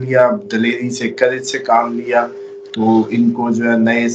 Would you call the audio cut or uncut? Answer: uncut